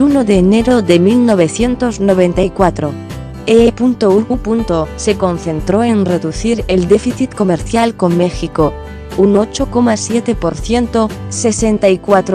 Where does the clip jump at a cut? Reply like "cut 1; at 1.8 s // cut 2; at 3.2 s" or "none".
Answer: none

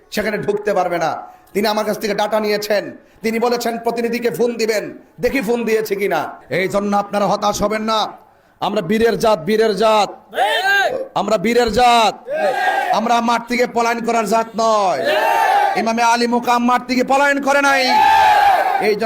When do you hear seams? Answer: cut 1; at 6.4 s

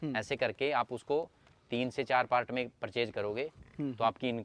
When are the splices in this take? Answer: none

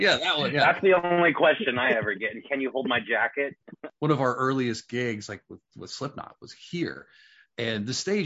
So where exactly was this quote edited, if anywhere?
cut 1; at 3.8 s

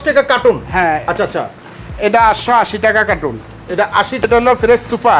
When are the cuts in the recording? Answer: cut 1; at 4.2 s

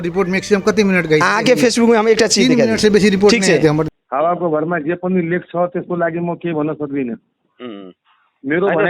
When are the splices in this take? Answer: cut 1; at 3.8 s

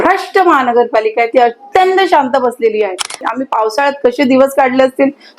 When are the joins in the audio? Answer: cut 1; at 3.2 s

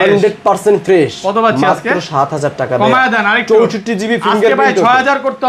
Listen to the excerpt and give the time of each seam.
none

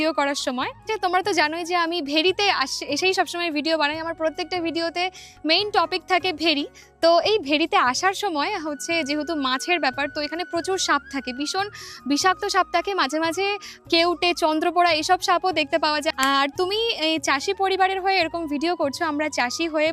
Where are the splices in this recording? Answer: cut 1; at 0.8 s // cut 2; at 16.1 s

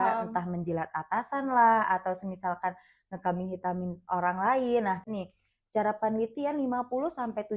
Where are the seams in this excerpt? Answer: cut 1; at 5.1 s

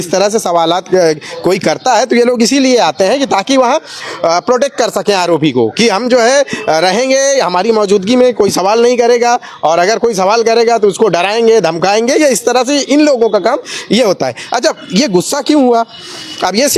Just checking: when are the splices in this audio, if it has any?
none

